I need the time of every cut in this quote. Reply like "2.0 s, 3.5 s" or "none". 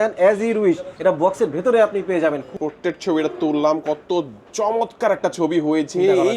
2.5 s